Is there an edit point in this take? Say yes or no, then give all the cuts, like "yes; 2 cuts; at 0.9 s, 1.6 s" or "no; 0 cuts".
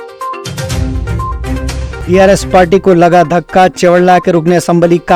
no; 0 cuts